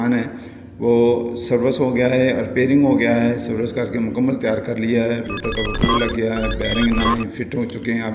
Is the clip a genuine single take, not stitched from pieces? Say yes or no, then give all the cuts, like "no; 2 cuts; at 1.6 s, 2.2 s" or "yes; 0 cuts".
yes; 0 cuts